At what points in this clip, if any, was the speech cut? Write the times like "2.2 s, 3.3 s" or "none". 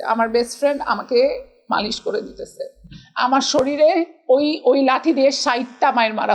none

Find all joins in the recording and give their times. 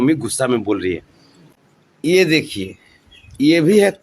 1.4 s

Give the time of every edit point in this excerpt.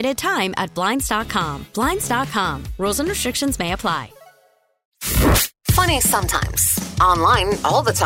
4.9 s

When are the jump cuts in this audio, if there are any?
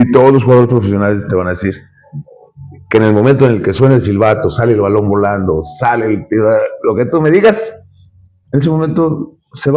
none

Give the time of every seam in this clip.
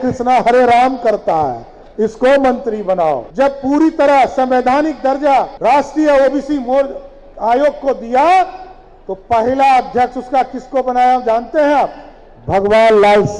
3.2 s, 5.5 s

